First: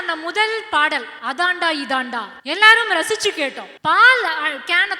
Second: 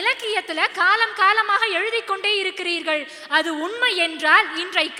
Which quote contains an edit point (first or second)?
first